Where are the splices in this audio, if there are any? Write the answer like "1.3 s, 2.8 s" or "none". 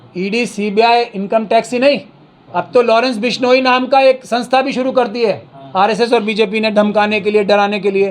none